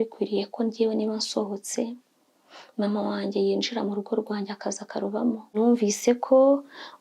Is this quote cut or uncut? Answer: cut